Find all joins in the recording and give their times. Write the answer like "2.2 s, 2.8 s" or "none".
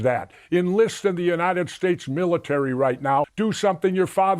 3.3 s